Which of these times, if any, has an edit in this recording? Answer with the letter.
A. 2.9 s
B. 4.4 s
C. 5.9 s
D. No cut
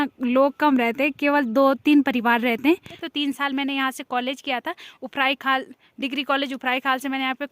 A